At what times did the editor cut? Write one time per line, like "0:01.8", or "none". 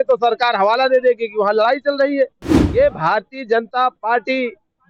none